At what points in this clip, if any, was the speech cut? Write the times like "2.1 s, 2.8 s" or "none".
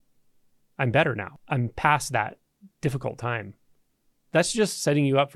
1.3 s